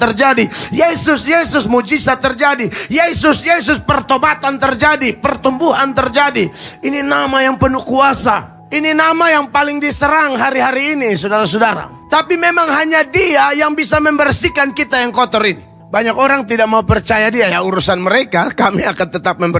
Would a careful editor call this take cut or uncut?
cut